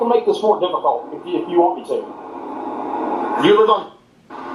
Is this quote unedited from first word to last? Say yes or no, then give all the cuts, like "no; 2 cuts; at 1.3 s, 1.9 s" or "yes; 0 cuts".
yes; 0 cuts